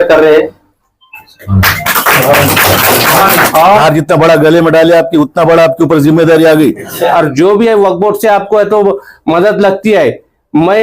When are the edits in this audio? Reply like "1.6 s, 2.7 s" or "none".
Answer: 3.8 s, 7.1 s